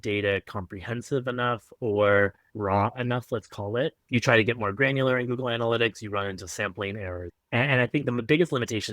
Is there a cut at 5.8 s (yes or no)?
no